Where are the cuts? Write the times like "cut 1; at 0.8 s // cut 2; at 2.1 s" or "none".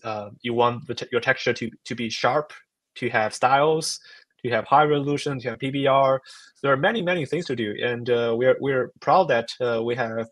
none